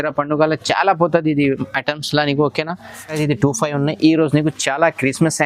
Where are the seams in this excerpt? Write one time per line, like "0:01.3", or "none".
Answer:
0:03.2

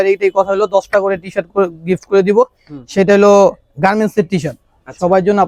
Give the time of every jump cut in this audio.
none

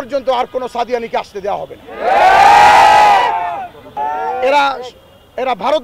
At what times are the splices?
0:03.9

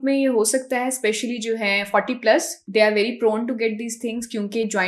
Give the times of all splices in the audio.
none

